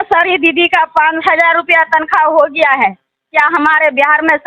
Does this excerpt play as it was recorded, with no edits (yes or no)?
yes